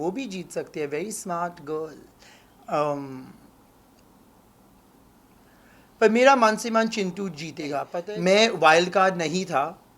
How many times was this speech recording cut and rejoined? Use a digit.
1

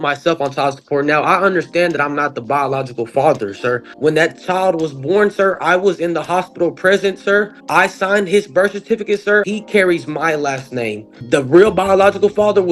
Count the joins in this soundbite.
4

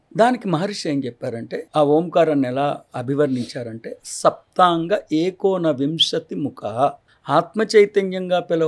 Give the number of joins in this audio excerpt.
2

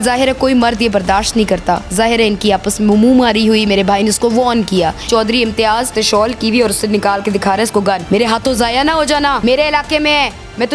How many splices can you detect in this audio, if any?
4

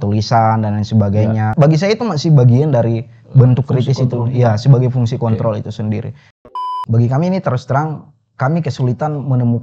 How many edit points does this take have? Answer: 2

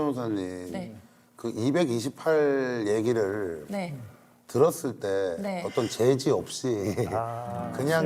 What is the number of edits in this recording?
0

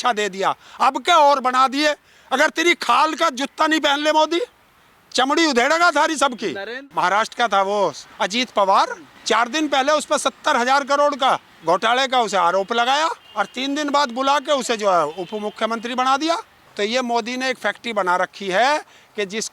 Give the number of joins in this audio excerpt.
6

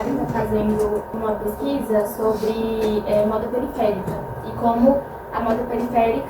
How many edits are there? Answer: 1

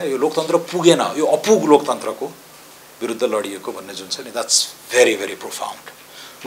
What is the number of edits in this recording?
0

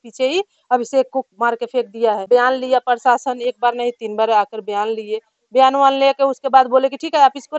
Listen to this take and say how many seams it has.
1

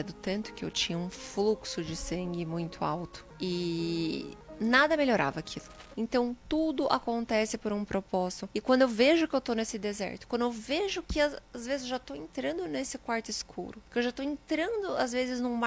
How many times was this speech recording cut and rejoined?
5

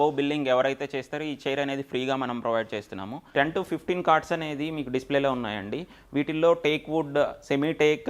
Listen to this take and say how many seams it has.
1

